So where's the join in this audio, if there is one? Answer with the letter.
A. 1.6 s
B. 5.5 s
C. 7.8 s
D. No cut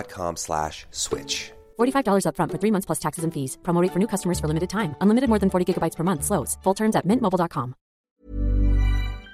C